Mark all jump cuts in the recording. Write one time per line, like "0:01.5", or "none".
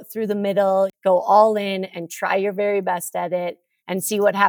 0:00.9